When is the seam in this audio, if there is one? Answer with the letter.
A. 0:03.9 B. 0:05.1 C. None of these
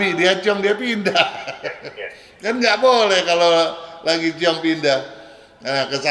C